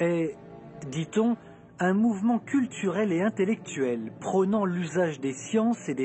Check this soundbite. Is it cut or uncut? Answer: cut